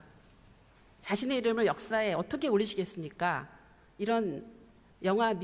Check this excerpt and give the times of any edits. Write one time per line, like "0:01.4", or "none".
0:02.1